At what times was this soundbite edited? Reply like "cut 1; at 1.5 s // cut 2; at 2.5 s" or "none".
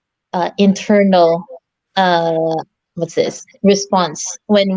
none